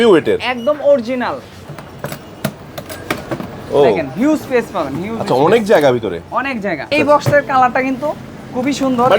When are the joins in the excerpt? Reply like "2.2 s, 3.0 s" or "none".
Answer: 1.6 s, 6.9 s